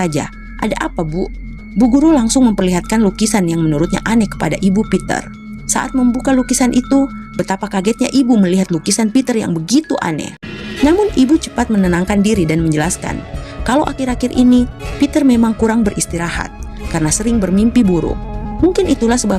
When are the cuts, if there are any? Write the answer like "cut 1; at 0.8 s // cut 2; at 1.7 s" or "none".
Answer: none